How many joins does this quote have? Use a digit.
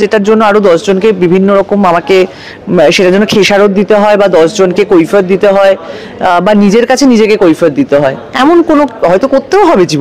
0